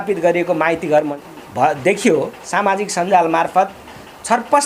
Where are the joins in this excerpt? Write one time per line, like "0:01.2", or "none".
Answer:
0:01.1